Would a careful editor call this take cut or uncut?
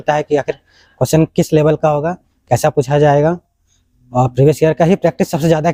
uncut